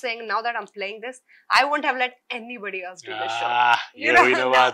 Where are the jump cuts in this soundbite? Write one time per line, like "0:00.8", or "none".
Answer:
none